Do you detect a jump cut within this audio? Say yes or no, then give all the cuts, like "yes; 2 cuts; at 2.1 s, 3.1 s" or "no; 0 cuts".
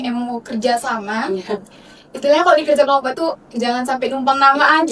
no; 0 cuts